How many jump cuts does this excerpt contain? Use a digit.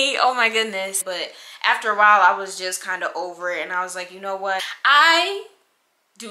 2